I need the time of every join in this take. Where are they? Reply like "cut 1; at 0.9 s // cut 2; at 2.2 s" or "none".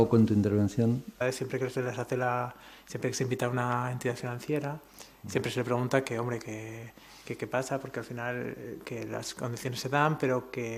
none